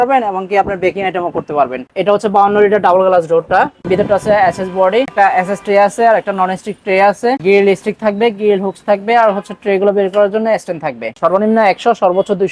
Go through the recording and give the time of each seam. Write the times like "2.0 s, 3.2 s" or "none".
1.8 s, 3.8 s, 5.1 s, 7.4 s, 11.2 s